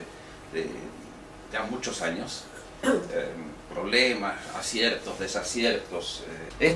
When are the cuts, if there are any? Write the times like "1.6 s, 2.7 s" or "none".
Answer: none